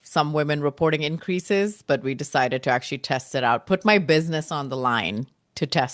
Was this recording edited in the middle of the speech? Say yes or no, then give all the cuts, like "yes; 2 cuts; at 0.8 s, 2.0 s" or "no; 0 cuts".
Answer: no; 0 cuts